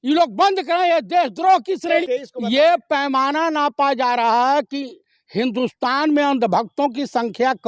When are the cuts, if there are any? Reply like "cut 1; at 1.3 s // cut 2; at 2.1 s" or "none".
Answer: cut 1; at 1.9 s